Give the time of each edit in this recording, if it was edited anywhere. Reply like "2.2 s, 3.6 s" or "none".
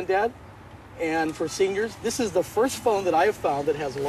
none